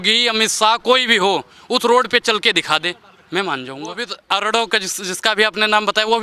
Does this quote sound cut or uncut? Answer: cut